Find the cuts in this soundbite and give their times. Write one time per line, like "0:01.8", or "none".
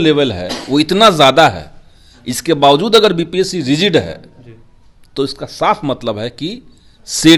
none